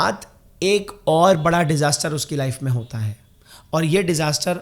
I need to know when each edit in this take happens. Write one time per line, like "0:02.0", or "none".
none